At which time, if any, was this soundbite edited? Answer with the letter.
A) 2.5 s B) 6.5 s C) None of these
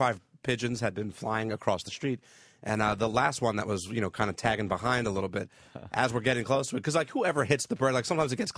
B